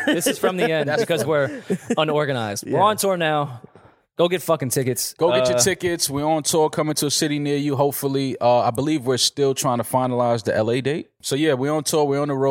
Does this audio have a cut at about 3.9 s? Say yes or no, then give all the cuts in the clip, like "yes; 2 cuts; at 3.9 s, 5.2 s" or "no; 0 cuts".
no; 1 cut; at 11.2 s